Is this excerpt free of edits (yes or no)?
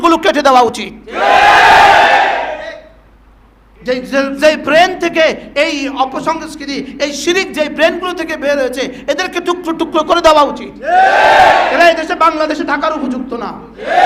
yes